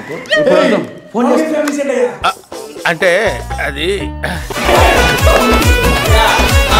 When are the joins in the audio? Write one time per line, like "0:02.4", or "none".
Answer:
none